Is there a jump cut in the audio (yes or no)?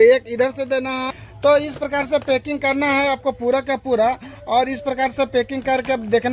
yes